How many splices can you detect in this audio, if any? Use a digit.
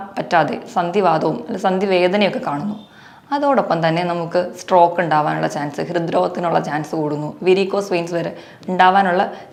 0